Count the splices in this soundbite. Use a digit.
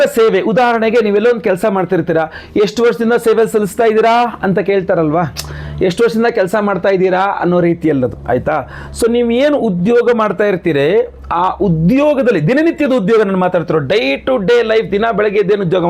0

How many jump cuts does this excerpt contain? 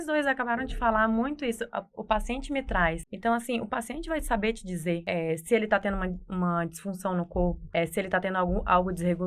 3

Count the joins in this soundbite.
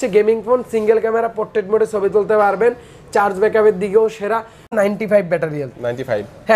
1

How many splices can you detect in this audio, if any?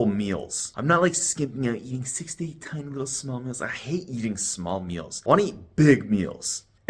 0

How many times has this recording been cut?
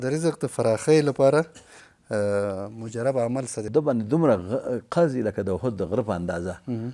1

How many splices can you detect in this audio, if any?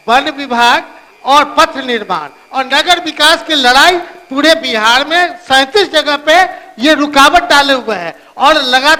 0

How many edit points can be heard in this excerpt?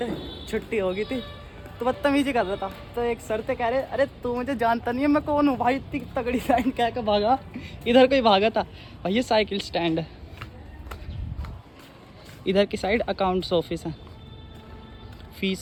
0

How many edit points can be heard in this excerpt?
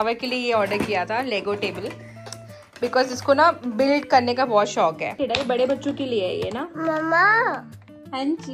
1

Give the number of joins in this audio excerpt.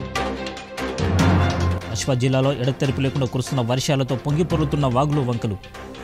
1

